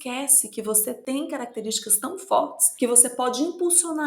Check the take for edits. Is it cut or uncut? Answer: cut